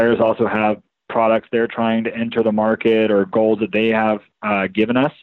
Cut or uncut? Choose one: uncut